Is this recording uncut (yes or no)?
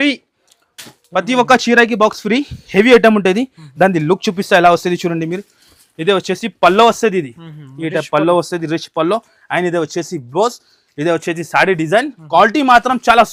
yes